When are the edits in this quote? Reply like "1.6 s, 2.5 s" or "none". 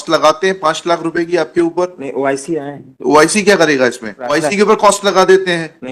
4.3 s